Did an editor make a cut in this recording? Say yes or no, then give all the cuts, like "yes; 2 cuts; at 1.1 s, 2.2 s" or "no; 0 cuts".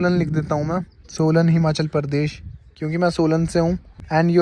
no; 0 cuts